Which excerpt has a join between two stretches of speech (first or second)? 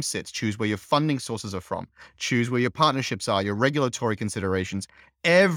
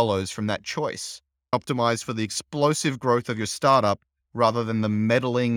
second